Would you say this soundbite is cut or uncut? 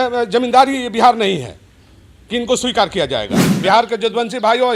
cut